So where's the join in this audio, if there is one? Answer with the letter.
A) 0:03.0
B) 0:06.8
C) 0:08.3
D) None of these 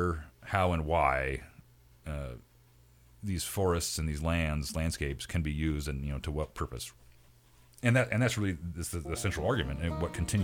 B